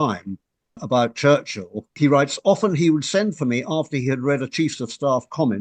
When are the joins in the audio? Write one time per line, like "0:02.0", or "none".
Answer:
0:00.8
0:01.9

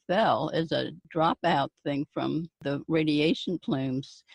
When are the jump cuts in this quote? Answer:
0:01.0
0:02.6

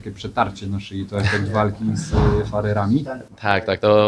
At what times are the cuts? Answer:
none

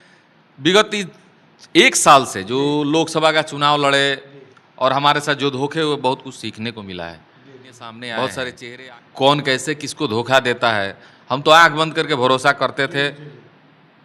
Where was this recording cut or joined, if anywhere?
0:08.6

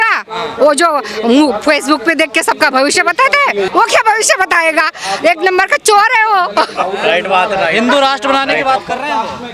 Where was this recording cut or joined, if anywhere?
none

